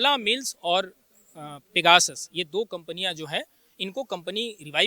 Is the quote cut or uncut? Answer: uncut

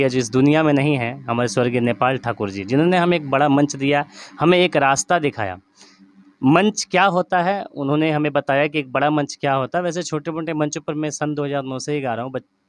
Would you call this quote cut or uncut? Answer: uncut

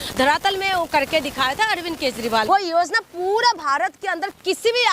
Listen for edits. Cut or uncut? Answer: cut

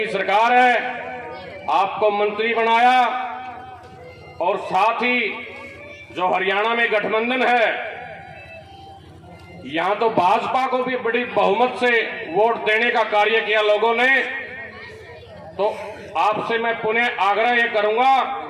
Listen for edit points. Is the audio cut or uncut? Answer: uncut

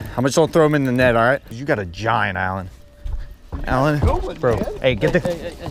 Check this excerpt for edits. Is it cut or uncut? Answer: cut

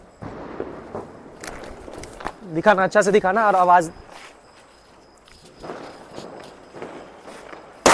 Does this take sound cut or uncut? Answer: uncut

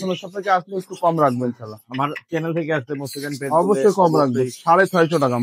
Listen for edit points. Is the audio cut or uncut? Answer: uncut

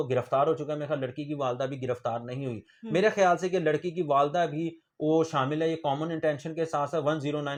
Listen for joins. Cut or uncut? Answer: uncut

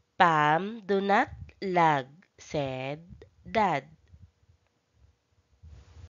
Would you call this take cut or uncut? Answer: cut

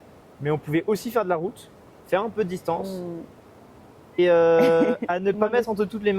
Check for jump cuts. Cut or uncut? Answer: cut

